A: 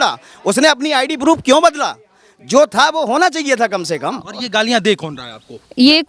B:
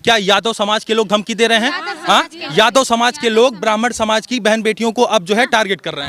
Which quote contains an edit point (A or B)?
A